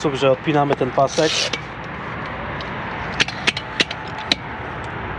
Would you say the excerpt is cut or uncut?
uncut